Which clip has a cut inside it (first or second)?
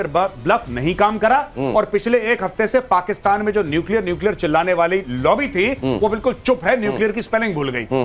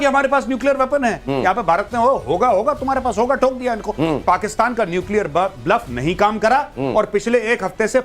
second